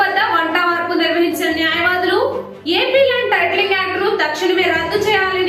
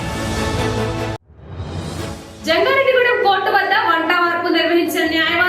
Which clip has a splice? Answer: second; 1 cut; at 2.3 s

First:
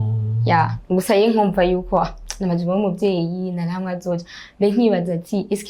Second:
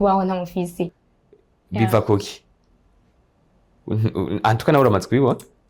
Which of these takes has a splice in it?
second; 1 cut; at 0.9 s

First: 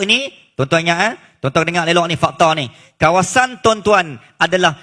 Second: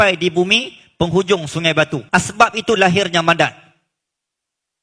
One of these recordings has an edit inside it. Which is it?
second; 1 cut; at 2.0 s

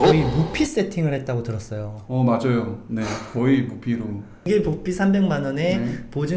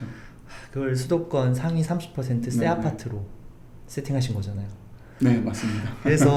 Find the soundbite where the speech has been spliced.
first; 1 cut; at 4.5 s

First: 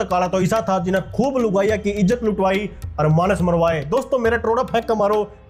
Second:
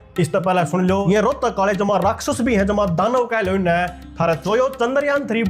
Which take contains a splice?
second; 2 cuts; at 1.0 s, 4.4 s

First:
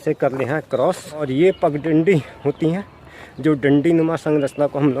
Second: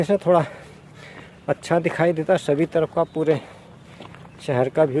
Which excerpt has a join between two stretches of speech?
first; 1 cut; at 1.2 s

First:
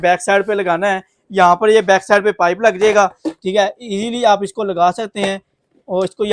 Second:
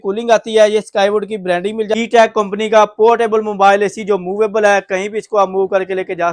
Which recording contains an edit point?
second; 1 cut; at 1.9 s

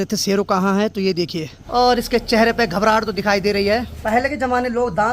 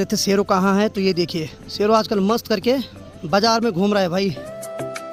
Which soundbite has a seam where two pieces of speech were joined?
first; 2 cuts; at 1.6 s, 3.9 s

